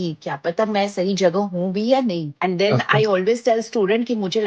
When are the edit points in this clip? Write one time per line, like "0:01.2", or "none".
0:02.3